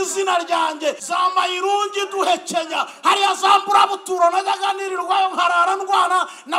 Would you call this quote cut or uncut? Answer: cut